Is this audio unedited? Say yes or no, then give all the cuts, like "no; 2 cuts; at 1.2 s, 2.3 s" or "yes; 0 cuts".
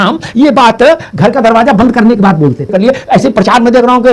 no; 1 cut; at 2.7 s